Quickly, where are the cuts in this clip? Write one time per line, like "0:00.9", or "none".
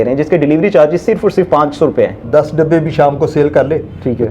0:02.2